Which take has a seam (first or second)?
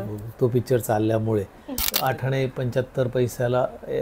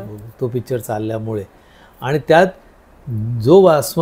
first